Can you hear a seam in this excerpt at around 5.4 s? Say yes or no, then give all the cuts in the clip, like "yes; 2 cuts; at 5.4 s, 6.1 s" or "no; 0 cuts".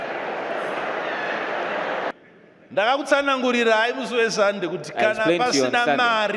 no; 1 cut; at 2.1 s